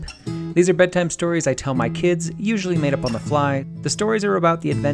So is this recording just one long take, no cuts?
no; 1 cut; at 3.7 s

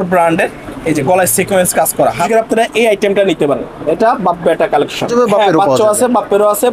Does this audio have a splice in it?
yes; 2 cuts; at 2.3 s, 5.1 s

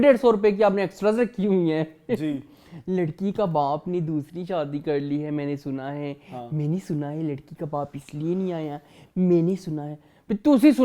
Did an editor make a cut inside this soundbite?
no; 0 cuts

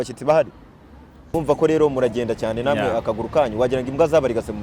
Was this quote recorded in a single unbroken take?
no; 1 cut; at 1.2 s

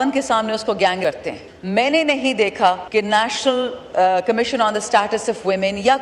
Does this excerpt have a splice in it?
yes; 2 cuts; at 1.0 s, 2.8 s

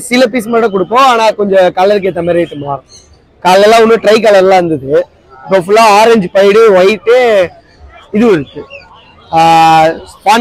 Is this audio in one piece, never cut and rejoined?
yes; 0 cuts

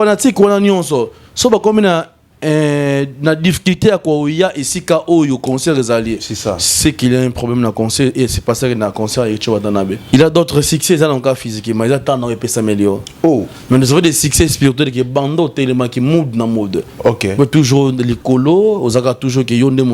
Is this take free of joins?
no; 1 cut; at 10.0 s

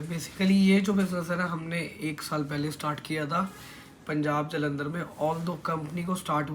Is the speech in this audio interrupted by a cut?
no; 0 cuts

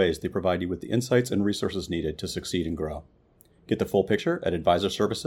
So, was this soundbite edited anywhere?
no; 0 cuts

